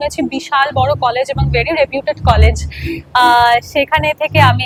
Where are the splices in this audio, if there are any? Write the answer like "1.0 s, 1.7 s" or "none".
none